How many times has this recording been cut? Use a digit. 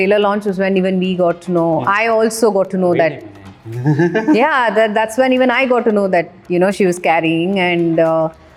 0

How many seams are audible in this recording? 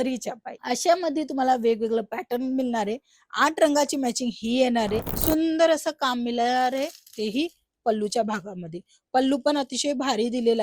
1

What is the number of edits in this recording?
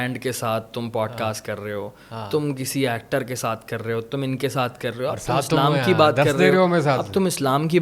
0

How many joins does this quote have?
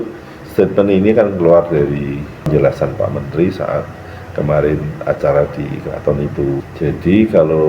2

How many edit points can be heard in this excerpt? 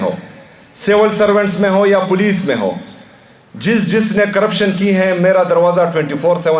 0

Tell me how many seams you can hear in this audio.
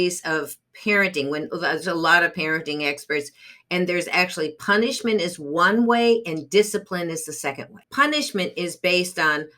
1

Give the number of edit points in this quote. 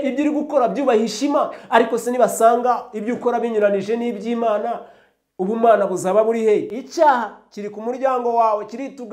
1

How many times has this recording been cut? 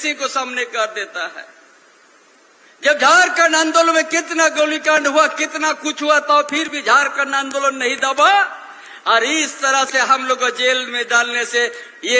0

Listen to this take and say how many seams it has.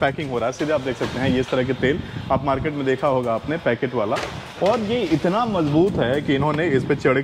0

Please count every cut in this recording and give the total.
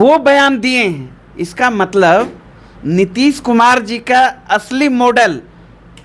0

